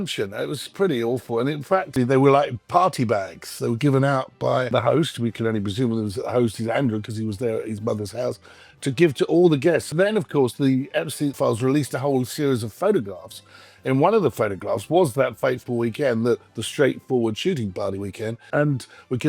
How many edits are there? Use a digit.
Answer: 5